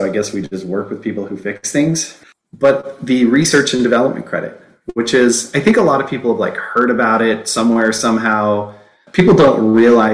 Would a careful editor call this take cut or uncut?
cut